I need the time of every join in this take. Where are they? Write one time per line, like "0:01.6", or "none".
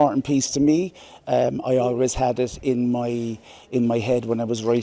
none